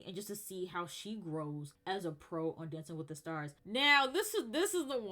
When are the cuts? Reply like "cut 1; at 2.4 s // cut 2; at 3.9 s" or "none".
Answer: cut 1; at 3.6 s